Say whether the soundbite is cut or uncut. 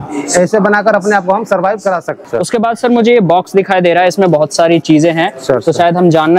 cut